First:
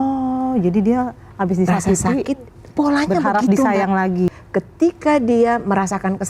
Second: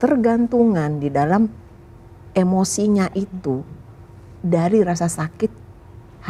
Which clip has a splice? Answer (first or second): first